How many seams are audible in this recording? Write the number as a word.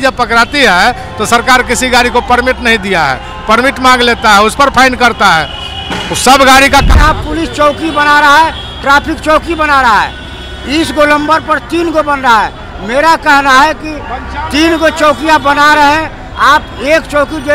one